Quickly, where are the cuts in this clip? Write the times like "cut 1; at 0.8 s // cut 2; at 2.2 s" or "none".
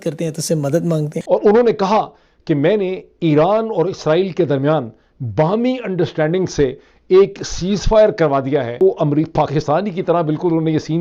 cut 1; at 1.2 s